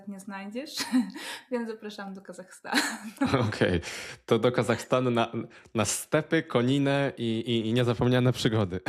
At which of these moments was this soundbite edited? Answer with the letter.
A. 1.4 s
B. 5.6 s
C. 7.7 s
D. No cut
D